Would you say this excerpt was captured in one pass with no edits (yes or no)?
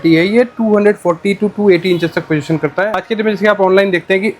no